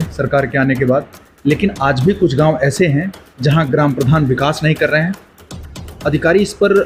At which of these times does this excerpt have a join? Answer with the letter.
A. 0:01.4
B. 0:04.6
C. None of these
C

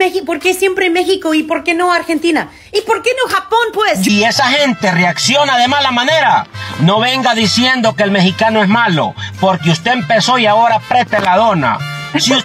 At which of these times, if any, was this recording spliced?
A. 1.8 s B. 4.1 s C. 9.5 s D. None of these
B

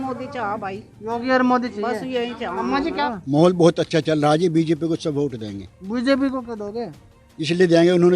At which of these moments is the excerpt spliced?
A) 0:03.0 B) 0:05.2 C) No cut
A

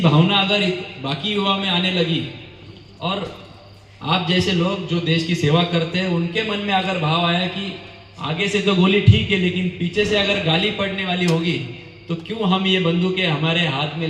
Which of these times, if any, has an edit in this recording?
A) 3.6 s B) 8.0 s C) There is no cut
C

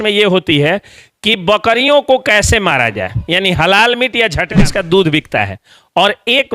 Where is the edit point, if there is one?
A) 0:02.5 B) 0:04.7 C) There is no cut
B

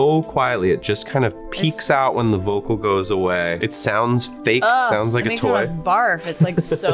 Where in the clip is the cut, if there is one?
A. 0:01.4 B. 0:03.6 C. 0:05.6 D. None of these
B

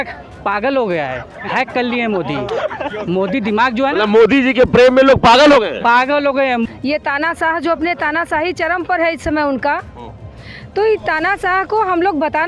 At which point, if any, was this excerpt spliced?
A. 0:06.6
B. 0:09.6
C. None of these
A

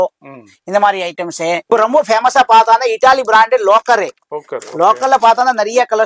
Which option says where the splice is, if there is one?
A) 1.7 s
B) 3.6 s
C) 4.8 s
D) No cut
A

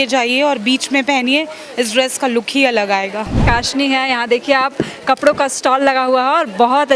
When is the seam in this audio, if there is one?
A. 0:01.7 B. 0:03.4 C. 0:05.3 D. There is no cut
B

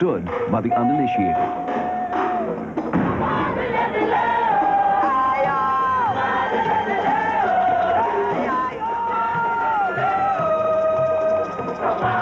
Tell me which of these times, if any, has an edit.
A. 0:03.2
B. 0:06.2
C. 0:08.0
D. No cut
B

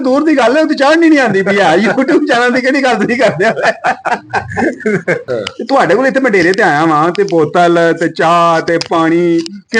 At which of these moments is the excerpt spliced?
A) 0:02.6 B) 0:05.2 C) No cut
B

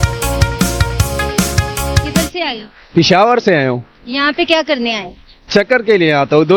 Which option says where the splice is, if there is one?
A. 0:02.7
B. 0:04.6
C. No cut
C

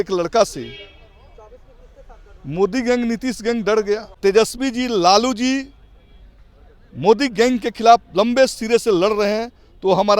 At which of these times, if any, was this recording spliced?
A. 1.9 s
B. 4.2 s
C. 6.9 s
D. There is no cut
B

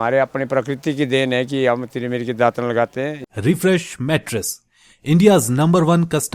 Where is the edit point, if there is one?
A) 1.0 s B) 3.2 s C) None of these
B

